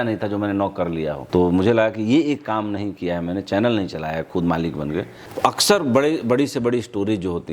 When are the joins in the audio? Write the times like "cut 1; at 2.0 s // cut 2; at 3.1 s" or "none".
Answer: cut 1; at 1.2 s // cut 2; at 5.2 s